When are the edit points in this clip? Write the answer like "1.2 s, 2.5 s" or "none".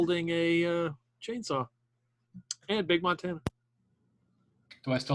none

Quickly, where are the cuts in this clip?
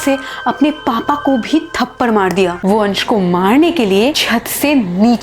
2.6 s

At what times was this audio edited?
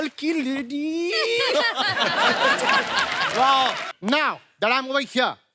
3.9 s

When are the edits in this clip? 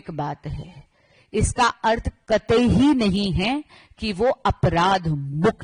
none

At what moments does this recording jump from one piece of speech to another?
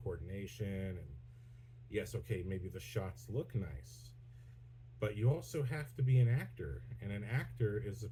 none

